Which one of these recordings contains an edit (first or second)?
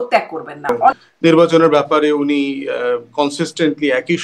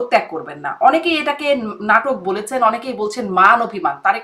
first